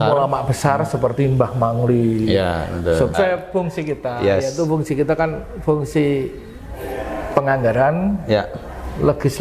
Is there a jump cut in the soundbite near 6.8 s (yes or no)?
no